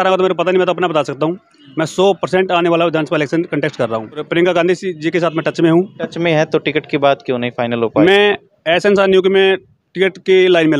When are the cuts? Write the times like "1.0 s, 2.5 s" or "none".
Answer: 4.3 s, 6.0 s, 7.9 s